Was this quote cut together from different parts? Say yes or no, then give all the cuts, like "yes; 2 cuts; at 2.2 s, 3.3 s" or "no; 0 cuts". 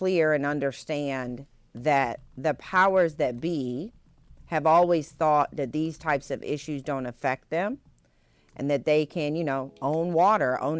no; 0 cuts